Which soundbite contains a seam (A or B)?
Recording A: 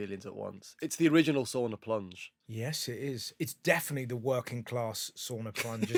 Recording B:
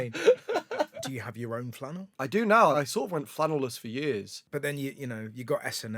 B